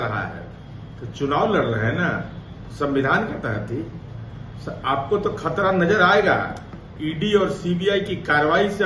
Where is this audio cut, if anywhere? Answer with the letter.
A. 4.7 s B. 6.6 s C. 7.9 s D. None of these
D